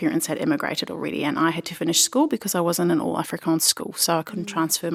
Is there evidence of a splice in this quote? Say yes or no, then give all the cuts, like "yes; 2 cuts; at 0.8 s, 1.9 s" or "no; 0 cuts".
no; 0 cuts